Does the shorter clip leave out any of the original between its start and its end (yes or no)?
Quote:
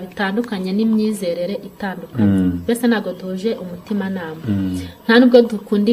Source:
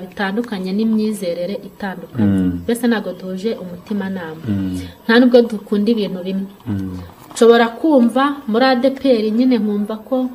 no